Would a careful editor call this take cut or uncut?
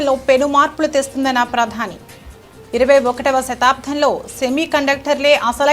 uncut